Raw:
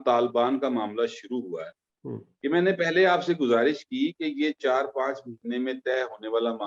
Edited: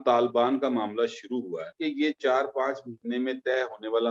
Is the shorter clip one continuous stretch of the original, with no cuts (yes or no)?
no